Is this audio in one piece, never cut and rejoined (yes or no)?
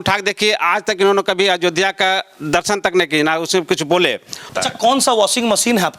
no